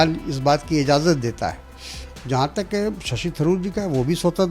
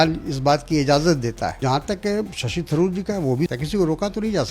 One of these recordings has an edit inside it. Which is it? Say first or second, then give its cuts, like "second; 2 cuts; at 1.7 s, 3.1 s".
second; 2 cuts; at 1.6 s, 3.5 s